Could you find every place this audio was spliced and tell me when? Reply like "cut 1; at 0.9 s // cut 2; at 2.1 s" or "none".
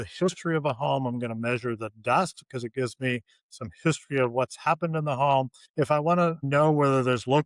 cut 1; at 6.4 s